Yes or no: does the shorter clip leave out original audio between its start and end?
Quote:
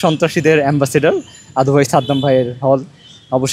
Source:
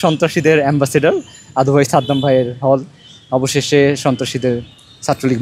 no